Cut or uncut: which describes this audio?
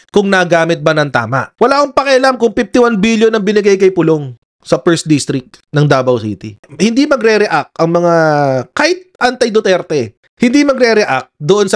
cut